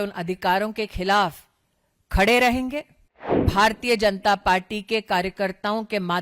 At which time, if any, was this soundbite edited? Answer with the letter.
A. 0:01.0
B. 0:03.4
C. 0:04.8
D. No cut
B